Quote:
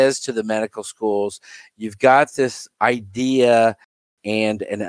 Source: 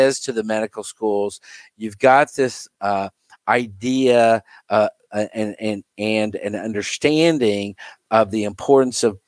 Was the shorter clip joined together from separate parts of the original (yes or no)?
yes